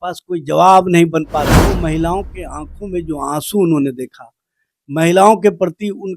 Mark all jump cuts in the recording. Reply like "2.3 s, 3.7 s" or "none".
1.6 s